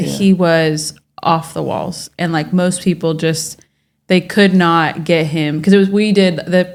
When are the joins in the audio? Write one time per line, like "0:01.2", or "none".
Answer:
none